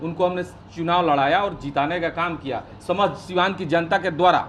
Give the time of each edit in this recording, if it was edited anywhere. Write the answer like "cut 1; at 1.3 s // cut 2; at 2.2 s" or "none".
none